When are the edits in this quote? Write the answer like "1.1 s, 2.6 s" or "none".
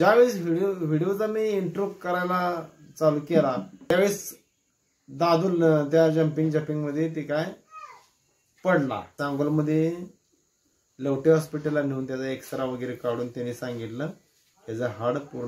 3.9 s, 9.1 s